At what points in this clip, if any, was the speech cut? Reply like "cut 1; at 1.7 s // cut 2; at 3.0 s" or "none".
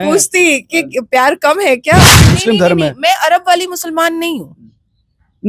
cut 1; at 2.3 s